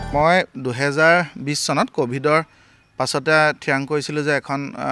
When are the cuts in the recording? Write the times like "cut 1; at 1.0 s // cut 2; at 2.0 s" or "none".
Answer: none